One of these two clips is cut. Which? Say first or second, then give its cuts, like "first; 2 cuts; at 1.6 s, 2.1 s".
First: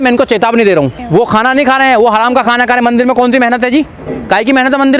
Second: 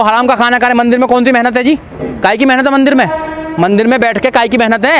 first; 1 cut; at 1.0 s